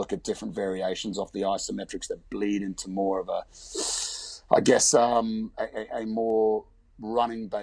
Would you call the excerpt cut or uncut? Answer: uncut